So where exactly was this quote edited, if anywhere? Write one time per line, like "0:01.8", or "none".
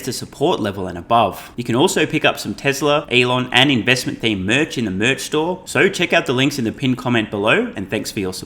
0:01.5
0:03.1
0:05.6